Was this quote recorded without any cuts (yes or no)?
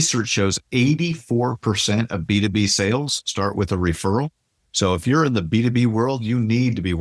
yes